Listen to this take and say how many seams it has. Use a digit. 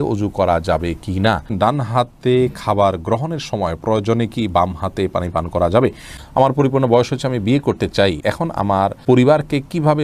3